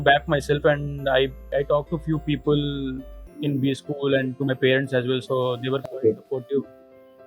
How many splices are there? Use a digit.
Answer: 1